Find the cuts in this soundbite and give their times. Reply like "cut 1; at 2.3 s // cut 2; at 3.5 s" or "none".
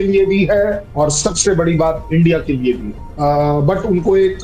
cut 1; at 3.1 s